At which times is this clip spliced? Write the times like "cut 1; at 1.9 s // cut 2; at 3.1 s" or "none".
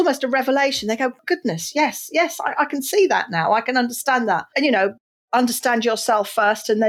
cut 1; at 1.2 s // cut 2; at 4.5 s